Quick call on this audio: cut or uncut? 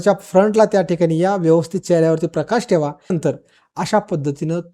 cut